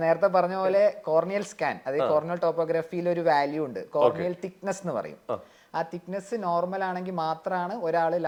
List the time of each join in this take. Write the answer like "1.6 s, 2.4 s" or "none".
none

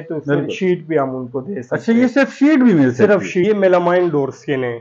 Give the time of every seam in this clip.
3.4 s

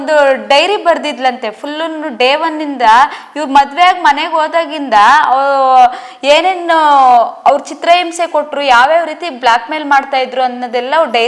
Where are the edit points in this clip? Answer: none

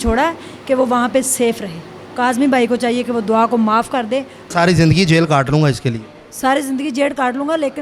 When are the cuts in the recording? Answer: 2.0 s, 4.4 s

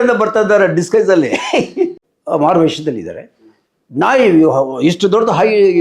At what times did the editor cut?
2.1 s

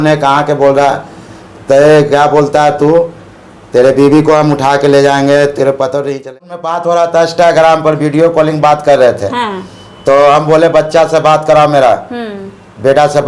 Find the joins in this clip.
6.4 s

